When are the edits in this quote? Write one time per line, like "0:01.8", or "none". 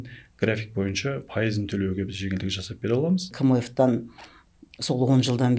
0:03.3